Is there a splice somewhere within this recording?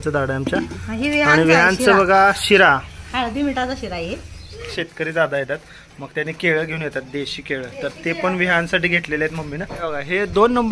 yes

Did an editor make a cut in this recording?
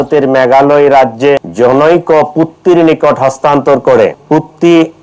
yes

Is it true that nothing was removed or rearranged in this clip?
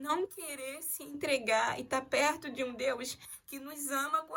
yes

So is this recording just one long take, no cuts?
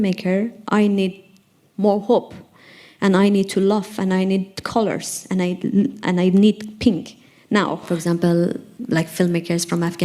no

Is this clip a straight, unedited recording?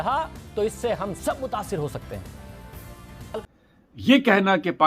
no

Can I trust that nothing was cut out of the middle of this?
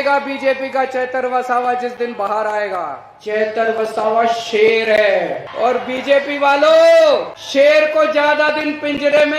no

